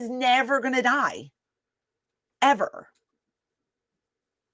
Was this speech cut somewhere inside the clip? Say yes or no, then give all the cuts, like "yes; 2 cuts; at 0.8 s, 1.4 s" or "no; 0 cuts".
no; 0 cuts